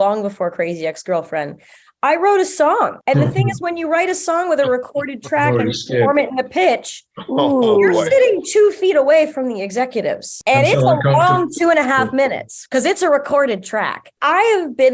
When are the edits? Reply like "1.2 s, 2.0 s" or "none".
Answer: 3.0 s, 10.3 s, 14.1 s